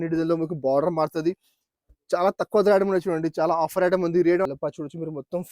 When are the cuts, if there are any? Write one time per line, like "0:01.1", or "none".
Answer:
0:04.5